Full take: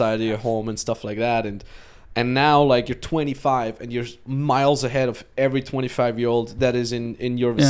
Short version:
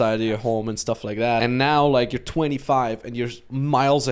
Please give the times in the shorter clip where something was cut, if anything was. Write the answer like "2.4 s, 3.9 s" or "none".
1.4 s